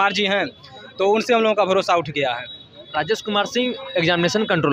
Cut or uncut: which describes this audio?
uncut